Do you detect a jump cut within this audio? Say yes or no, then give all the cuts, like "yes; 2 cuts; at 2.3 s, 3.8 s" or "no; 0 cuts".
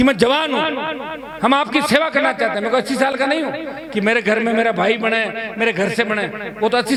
no; 0 cuts